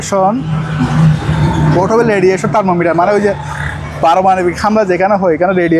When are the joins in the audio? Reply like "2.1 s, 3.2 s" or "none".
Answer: none

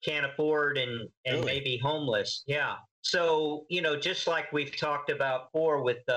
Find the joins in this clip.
2.9 s

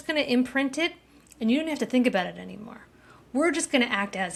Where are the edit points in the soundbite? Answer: none

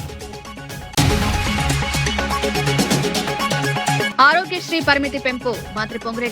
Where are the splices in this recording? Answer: 0.9 s, 4.1 s

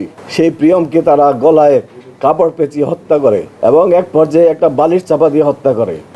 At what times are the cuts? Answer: 3.5 s

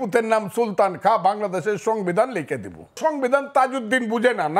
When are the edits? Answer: 3.0 s

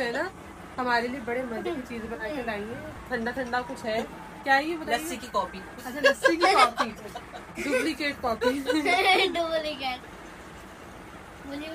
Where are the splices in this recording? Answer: 3.0 s

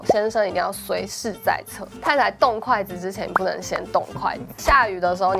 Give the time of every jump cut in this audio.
1.9 s, 4.5 s

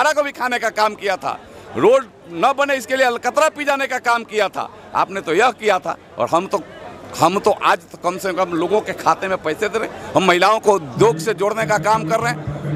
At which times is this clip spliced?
none

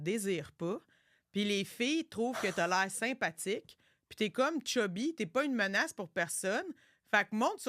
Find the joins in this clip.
none

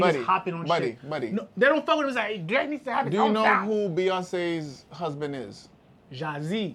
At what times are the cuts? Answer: none

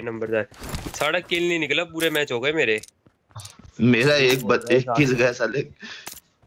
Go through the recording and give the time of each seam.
none

